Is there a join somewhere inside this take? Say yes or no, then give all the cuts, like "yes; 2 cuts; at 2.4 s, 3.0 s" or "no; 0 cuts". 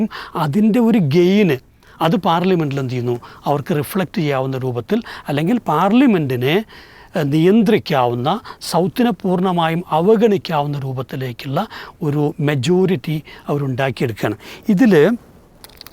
no; 0 cuts